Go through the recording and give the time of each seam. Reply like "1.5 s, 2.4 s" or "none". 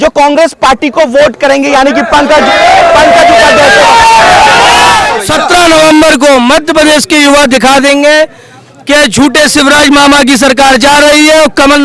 5.2 s